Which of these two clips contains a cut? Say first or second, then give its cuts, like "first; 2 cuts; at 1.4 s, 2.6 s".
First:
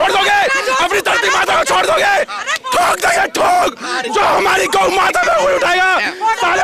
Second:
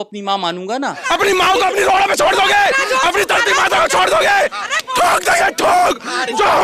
second; 1 cut; at 1.0 s